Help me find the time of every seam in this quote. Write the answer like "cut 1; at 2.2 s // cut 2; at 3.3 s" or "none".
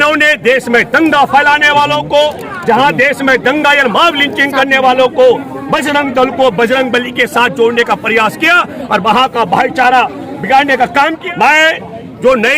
cut 1; at 11.2 s